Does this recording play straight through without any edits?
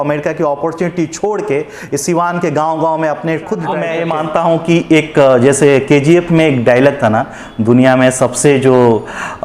no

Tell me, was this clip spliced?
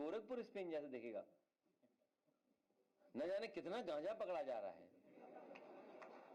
no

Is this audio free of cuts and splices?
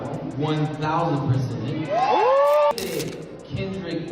no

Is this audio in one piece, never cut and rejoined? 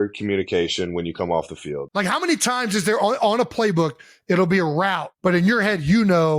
no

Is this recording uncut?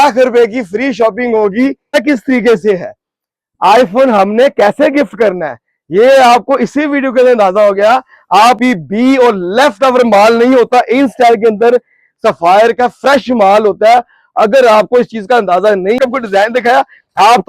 no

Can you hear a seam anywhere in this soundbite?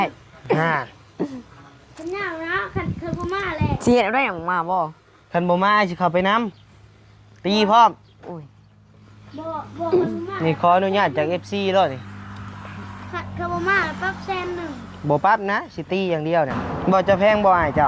yes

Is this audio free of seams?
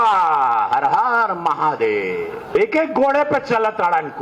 no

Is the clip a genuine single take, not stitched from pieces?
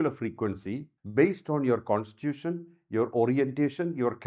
no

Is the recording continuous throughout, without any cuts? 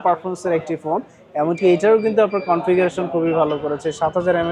yes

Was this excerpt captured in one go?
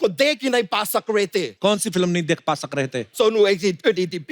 no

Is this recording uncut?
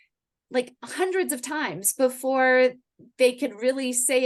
yes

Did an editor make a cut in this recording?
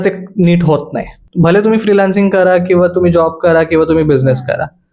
yes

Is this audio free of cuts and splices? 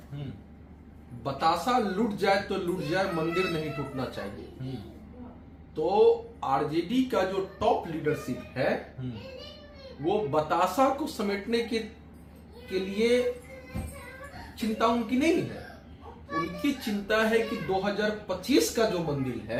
yes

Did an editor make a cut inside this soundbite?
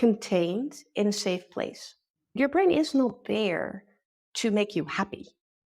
yes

